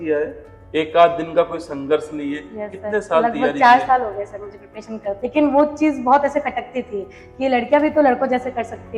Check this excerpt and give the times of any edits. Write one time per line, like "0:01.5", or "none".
0:05.1